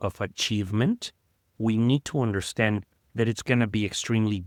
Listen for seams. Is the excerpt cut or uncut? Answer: uncut